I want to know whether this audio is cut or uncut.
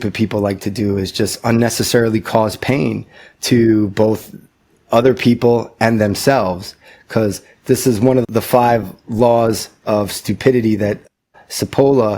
cut